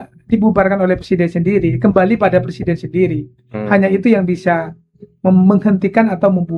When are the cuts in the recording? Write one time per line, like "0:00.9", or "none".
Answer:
none